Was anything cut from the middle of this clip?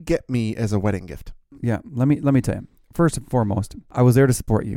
yes; 2 cuts; at 1.5 s, 3.9 s

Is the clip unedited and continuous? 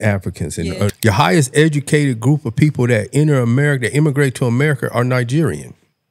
no; 1 cut; at 0.9 s

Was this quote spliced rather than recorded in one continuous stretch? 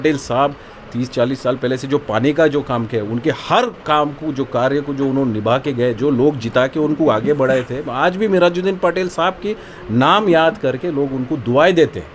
no; 0 cuts

